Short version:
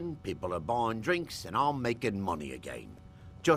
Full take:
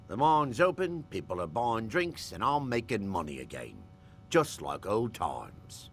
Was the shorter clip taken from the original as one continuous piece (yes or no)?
yes